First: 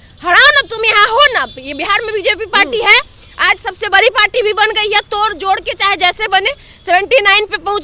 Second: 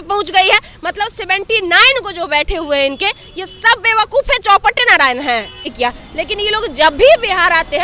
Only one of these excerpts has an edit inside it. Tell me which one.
second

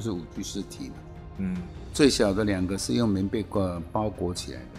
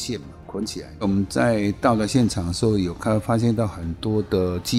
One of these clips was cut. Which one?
second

